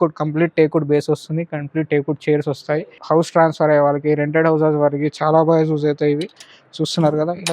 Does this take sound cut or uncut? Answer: cut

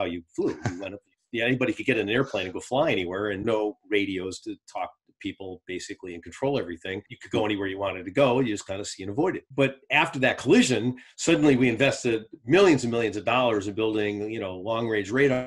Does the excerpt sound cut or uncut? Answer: cut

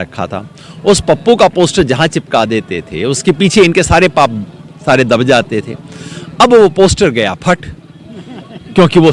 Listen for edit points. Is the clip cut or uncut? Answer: uncut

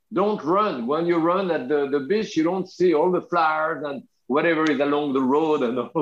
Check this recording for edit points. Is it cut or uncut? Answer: uncut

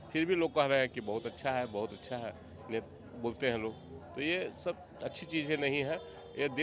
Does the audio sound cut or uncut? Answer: uncut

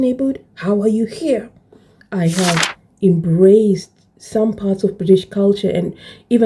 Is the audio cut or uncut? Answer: cut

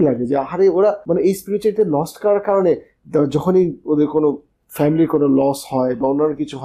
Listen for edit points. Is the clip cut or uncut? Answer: cut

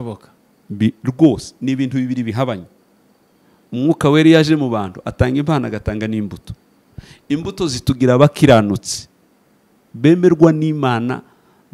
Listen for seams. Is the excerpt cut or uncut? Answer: uncut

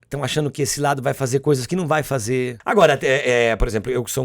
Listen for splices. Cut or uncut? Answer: cut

